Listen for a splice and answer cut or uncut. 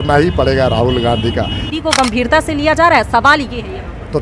cut